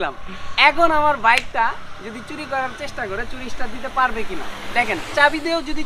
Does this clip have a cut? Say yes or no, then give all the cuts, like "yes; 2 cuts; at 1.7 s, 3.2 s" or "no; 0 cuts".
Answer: no; 0 cuts